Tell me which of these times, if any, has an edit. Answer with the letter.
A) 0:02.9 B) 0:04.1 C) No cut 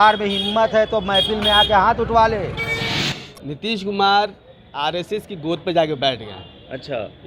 A